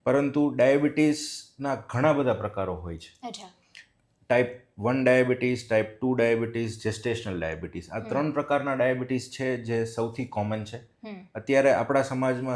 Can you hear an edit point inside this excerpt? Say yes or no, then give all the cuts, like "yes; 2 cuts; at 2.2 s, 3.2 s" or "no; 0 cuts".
no; 0 cuts